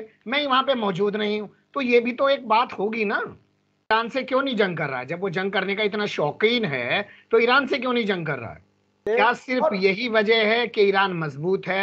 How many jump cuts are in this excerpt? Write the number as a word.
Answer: two